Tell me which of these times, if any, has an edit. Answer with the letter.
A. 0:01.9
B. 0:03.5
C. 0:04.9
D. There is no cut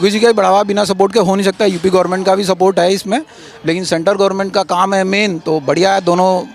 D